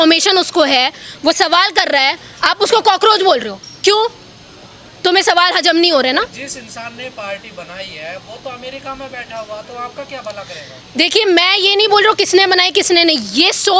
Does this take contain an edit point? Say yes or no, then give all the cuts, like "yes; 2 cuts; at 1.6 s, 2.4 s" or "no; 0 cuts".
no; 0 cuts